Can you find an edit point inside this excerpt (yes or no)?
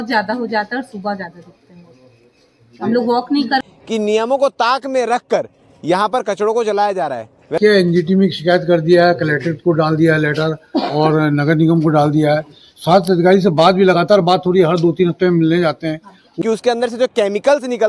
yes